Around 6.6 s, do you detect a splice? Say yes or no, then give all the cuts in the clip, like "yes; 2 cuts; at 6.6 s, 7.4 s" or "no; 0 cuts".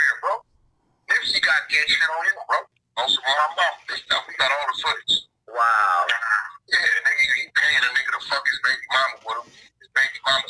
no; 0 cuts